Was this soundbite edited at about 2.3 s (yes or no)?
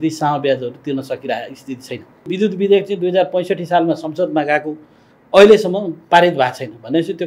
yes